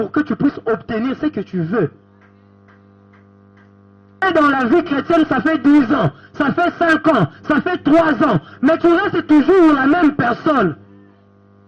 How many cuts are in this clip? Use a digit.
1